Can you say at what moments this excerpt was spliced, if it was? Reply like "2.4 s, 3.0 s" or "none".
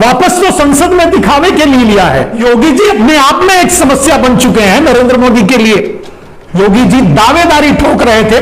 2.3 s, 6.4 s

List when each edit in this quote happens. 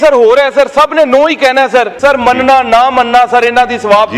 1.9 s

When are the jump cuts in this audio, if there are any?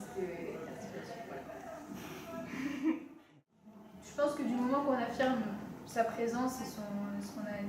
3.2 s

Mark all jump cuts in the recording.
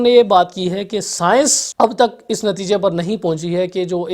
1.6 s

